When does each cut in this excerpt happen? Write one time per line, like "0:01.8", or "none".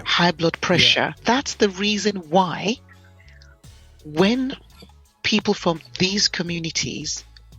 0:01.1